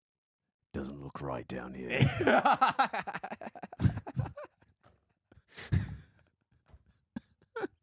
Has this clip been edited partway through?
no; 0 cuts

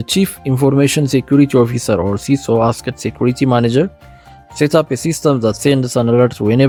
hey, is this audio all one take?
yes; 0 cuts

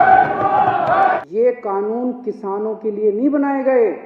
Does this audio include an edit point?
yes; 1 cut; at 1.2 s

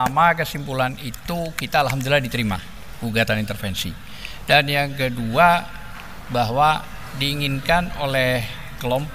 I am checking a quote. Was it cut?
no; 0 cuts

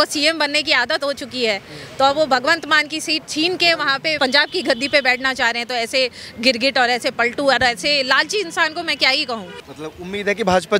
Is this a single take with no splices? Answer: no; 2 cuts; at 4.2 s, 9.6 s

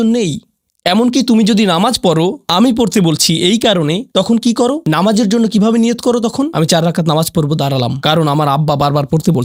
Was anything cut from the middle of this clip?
no; 0 cuts

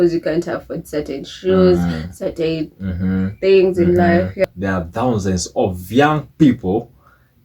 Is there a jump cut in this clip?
yes; 1 cut; at 4.5 s

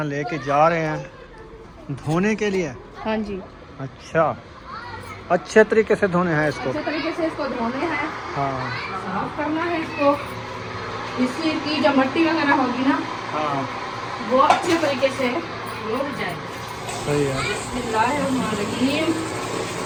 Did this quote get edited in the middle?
no; 0 cuts

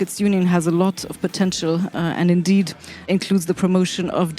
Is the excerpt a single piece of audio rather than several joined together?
no; 1 cut; at 3.1 s

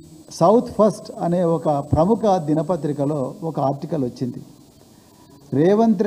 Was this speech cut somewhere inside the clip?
no; 0 cuts

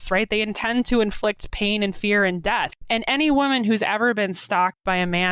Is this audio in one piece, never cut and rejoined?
no; 1 cut; at 2.8 s

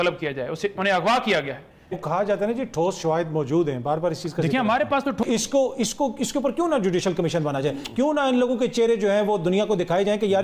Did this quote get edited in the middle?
yes; 2 cuts; at 2.0 s, 5.2 s

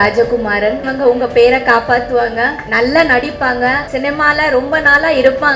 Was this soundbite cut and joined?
yes; 3 cuts; at 0.9 s, 2.6 s, 3.9 s

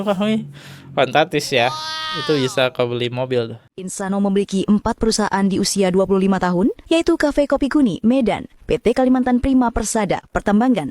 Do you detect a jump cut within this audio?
yes; 1 cut; at 4.0 s

